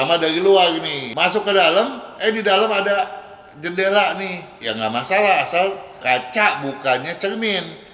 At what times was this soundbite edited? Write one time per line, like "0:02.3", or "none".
0:01.0
0:04.6